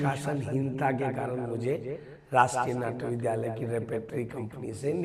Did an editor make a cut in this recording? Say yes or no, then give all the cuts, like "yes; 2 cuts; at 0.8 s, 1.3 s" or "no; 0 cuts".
no; 0 cuts